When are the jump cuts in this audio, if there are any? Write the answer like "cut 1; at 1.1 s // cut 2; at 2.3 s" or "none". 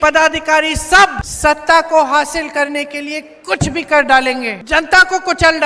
cut 1; at 1.3 s // cut 2; at 4.5 s